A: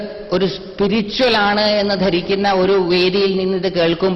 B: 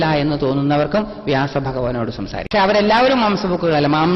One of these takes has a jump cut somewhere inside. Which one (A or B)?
B